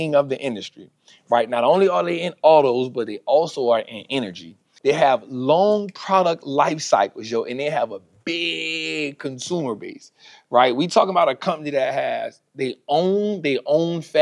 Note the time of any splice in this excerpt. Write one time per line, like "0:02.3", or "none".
0:04.6